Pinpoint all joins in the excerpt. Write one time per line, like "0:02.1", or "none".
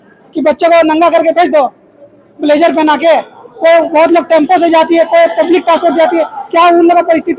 none